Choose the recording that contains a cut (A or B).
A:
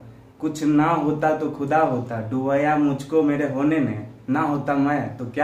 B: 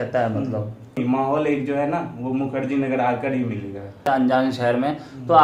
B